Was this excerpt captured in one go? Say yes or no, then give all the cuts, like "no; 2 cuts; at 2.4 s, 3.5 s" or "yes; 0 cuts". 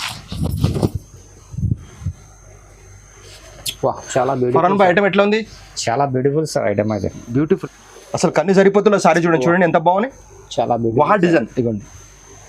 no; 1 cut; at 7.5 s